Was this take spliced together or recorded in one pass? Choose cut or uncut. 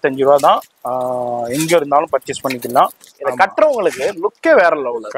cut